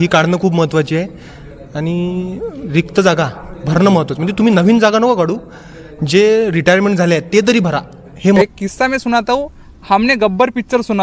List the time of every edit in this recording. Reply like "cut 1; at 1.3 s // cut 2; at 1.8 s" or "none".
cut 1; at 8.4 s